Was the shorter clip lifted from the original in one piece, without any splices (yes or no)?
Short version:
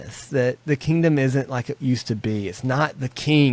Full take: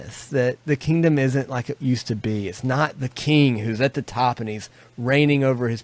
yes